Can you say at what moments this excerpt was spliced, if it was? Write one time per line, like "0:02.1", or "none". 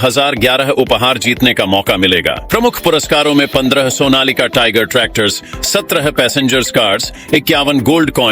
0:02.4